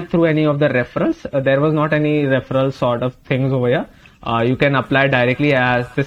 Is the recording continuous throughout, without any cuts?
yes; 0 cuts

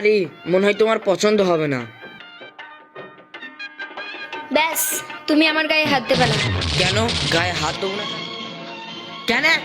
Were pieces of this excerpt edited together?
yes; 2 cuts; at 3.4 s, 8.0 s

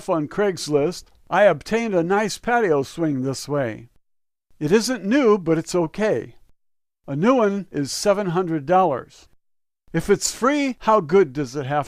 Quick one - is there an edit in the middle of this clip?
no; 0 cuts

